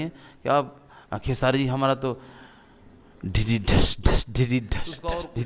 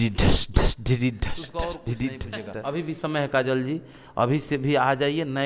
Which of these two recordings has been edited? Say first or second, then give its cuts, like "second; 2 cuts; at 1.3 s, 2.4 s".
second; 1 cut; at 3.0 s